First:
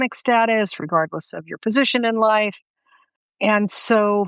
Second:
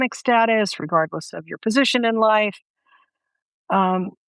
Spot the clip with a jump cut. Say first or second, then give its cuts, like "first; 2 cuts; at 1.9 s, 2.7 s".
first; 1 cut; at 3.2 s